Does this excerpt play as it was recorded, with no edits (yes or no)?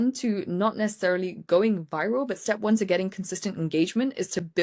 yes